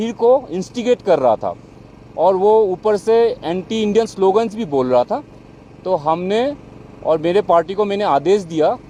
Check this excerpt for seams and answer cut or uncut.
uncut